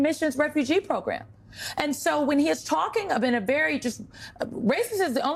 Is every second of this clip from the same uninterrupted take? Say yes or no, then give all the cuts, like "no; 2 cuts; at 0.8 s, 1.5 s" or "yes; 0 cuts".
yes; 0 cuts